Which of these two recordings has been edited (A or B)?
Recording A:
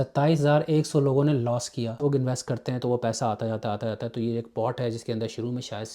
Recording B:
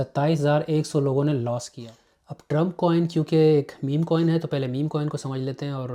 A